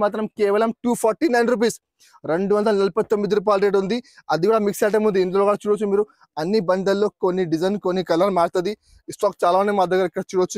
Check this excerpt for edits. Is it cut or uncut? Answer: uncut